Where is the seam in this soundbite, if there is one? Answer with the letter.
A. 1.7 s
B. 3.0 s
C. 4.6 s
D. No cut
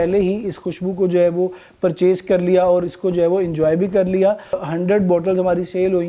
C